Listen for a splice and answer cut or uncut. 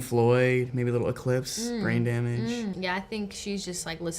cut